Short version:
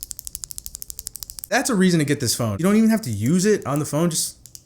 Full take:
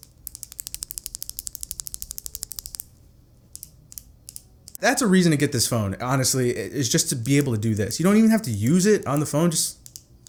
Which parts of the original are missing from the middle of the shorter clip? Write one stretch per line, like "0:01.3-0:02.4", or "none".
0:02.9-0:04.8
0:05.9-0:07.9